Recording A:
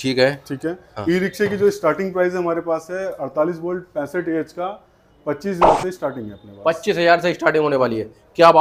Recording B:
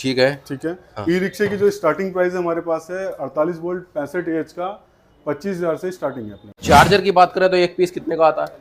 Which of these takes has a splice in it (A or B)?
B